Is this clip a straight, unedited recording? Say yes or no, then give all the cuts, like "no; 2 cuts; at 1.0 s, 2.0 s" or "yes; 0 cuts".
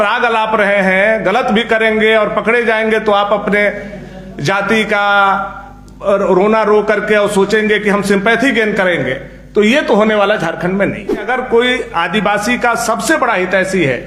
no; 1 cut; at 11.3 s